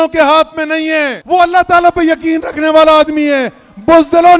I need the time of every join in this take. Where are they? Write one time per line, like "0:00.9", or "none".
0:01.2